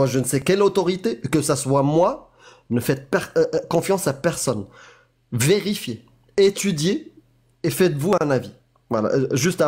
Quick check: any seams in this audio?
no; 0 cuts

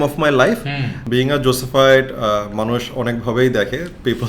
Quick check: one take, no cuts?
no; 1 cut; at 1.0 s

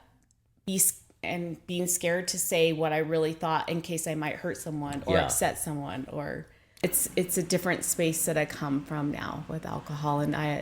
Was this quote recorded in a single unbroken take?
no; 1 cut; at 6.8 s

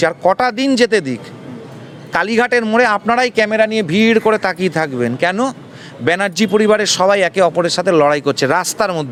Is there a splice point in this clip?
no; 0 cuts

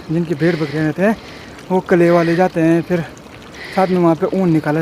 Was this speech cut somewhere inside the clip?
no; 0 cuts

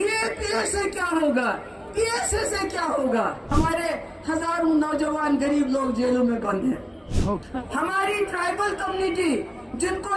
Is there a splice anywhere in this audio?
yes; 2 cuts; at 3.5 s, 7.2 s

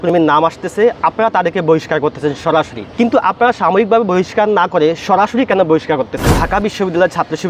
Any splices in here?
yes; 2 cuts; at 2.8 s, 6.4 s

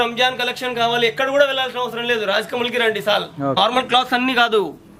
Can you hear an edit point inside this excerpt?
yes; 1 cut; at 3.6 s

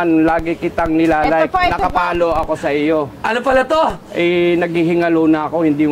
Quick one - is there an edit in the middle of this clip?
no; 0 cuts

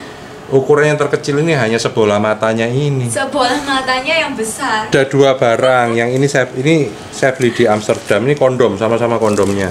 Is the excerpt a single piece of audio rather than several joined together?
no; 1 cut; at 4.9 s

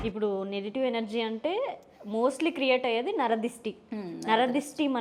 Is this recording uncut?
yes; 0 cuts

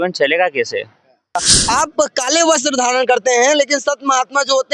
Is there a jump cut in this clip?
yes; 1 cut; at 1.4 s

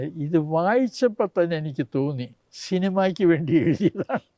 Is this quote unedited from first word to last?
yes; 0 cuts

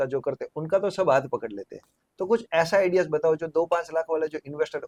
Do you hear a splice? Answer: no; 0 cuts

